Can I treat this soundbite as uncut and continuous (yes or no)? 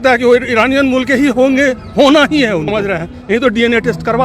no